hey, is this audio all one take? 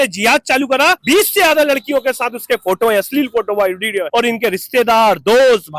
no; 2 cuts; at 1.0 s, 4.0 s

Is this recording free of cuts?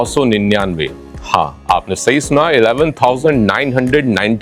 yes; 0 cuts

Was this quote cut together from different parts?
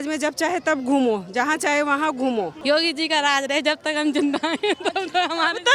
yes; 1 cut; at 2.6 s

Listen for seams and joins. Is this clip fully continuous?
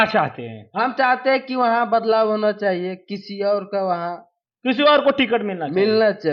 yes; 0 cuts

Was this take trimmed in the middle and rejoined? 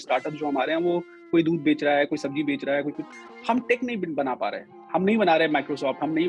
yes; 1 cut; at 4.7 s

